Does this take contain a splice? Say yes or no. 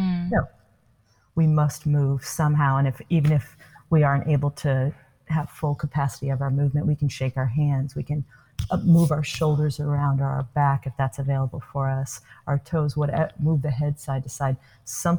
no